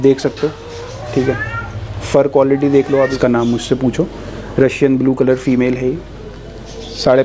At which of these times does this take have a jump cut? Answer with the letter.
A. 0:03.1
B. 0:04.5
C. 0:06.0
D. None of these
A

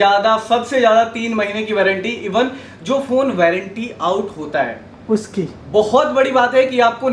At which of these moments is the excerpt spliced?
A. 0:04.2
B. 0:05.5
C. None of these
C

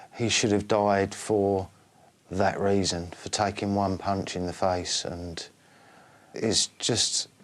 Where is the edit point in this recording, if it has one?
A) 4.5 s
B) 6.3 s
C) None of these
B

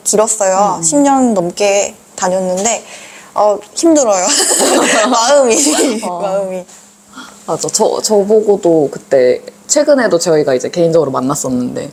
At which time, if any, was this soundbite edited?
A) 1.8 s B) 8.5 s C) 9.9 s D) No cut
D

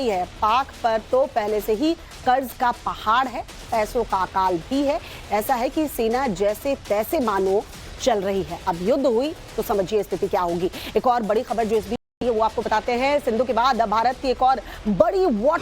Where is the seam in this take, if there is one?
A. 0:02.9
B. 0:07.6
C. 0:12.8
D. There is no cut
C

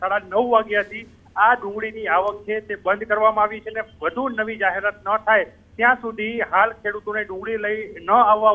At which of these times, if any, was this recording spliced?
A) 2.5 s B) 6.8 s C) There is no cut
B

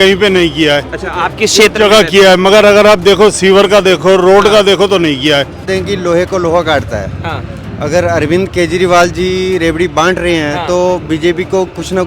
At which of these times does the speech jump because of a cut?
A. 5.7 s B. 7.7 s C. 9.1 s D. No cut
A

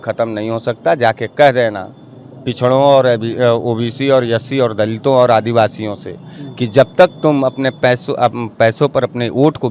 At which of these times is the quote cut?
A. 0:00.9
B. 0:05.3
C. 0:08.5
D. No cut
D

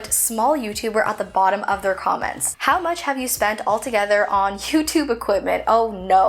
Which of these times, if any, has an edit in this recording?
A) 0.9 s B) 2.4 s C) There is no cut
B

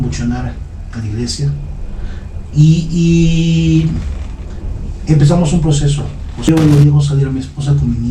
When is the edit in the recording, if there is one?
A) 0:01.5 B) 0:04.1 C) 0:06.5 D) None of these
C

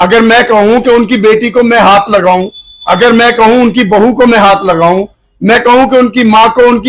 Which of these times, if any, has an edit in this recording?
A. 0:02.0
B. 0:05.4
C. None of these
C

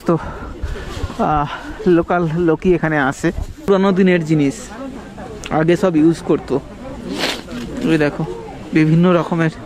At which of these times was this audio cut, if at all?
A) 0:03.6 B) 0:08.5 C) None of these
A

